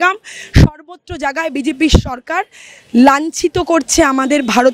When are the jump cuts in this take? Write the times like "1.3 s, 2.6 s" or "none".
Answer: none